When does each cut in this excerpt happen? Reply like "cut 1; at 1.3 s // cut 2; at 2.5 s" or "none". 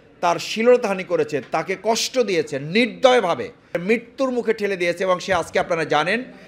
cut 1; at 3.8 s